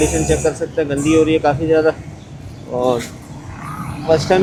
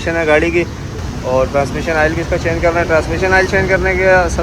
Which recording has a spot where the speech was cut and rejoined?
second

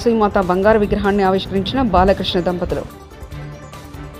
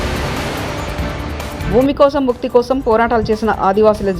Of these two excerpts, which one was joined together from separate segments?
second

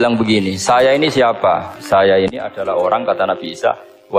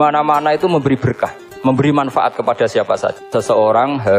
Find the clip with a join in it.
second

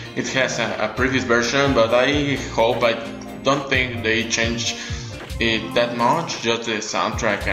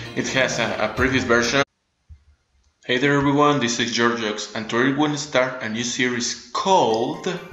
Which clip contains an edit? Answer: first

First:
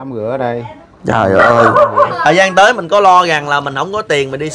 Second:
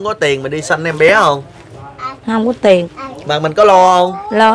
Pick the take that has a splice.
first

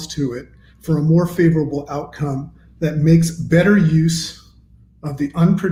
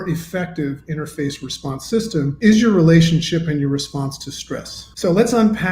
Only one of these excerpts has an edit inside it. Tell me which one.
second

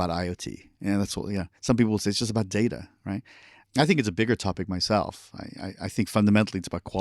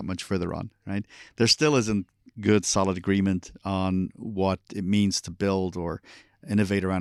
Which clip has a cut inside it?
first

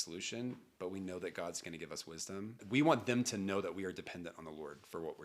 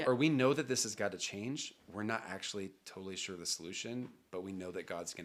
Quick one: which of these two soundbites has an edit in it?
first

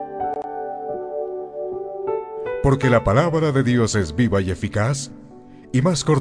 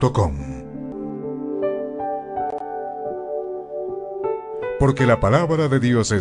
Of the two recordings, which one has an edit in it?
second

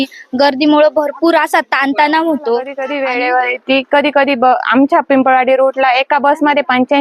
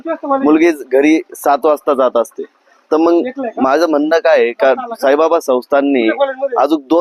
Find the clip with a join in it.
first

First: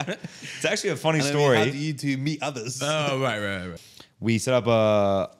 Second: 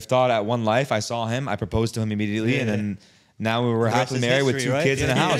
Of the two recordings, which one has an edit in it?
first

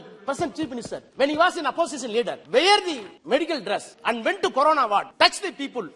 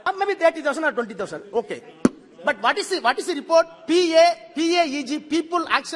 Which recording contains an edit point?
first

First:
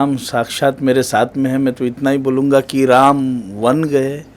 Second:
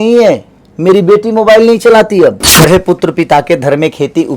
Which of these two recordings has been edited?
second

